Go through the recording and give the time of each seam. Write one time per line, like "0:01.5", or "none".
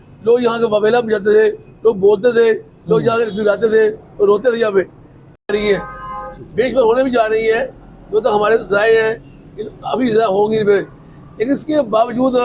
0:03.7
0:05.5